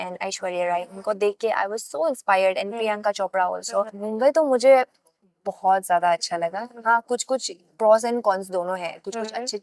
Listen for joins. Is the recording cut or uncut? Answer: cut